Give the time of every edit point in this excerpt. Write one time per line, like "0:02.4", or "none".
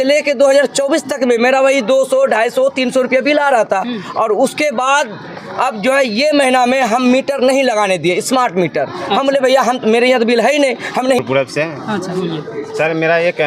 0:11.2